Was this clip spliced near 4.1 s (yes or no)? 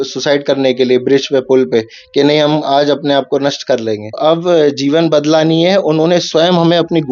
yes